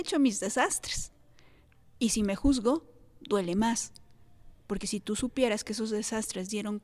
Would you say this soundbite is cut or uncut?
uncut